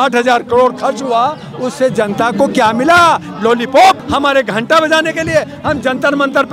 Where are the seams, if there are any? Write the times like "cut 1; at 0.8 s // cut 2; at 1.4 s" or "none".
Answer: cut 1; at 4.0 s